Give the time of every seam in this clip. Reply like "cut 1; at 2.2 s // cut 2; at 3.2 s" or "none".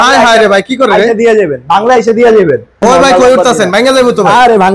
cut 1; at 2.8 s